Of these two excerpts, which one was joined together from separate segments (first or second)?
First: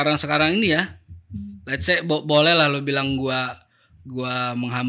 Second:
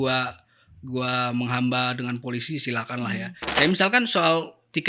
second